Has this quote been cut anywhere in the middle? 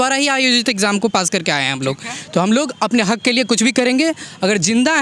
no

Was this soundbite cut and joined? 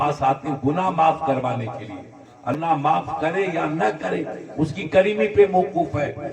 yes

